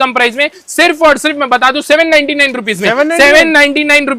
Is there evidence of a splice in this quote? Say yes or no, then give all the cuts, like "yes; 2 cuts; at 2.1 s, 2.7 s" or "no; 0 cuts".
no; 0 cuts